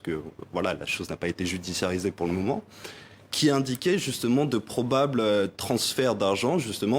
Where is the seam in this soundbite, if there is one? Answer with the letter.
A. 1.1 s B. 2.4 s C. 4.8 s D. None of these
D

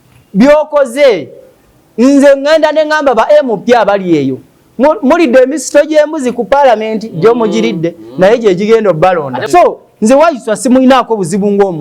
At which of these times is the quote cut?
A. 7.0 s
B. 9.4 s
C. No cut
B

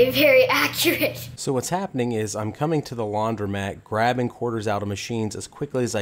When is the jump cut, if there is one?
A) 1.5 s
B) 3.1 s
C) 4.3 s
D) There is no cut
D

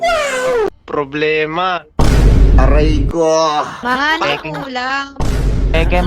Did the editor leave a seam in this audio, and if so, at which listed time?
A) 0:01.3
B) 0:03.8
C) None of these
B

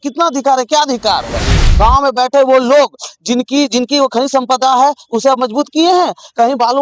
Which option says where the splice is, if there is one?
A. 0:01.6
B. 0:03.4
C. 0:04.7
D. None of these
A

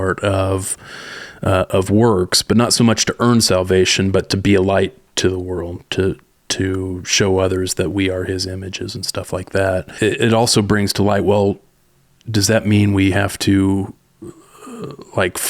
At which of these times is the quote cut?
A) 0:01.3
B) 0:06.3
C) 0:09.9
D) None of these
C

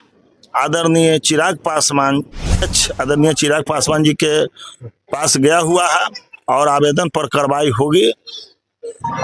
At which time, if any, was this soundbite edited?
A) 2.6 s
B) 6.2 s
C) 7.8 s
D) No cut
A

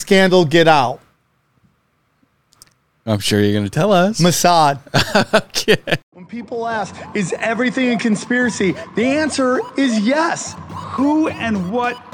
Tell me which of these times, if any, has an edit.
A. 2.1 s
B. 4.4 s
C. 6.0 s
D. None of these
C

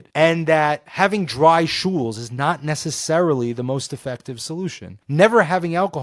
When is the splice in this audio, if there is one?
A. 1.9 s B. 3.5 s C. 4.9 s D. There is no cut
C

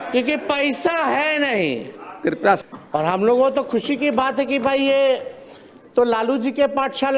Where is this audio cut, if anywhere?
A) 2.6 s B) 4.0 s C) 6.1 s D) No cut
A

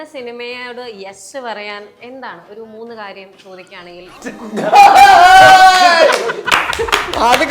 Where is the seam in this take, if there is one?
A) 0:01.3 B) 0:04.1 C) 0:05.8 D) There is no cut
B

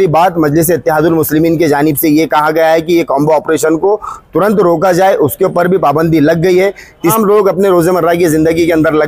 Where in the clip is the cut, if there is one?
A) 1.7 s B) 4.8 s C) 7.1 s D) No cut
C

